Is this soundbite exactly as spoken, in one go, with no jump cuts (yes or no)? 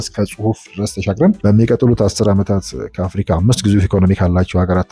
no